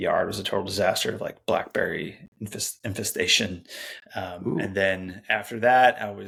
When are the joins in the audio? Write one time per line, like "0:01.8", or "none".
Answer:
none